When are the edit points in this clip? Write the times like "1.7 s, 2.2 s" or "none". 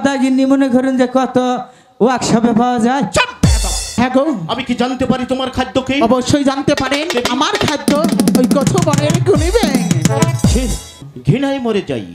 4.0 s, 7.1 s, 11.0 s

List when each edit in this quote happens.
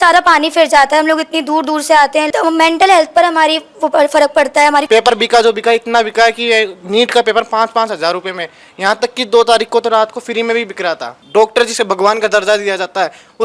2.3 s, 4.9 s, 11.2 s

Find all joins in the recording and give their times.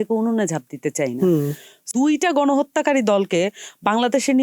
1.9 s

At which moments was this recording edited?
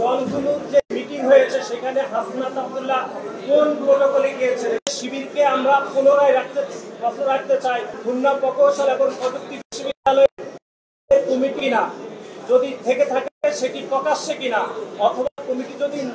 4.9 s, 8.0 s

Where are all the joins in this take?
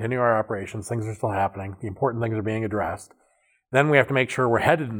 none

